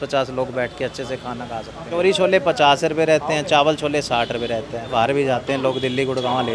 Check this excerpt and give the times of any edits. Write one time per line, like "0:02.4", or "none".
0:01.9
0:04.9